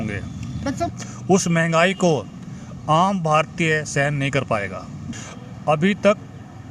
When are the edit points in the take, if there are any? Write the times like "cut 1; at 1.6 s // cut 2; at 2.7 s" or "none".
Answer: cut 1; at 0.9 s // cut 2; at 5.0 s